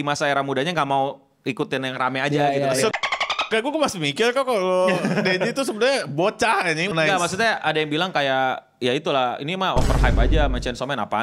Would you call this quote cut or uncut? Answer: cut